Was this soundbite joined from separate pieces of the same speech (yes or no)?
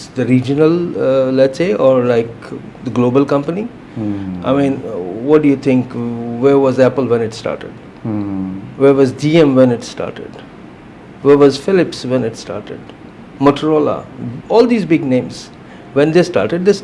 no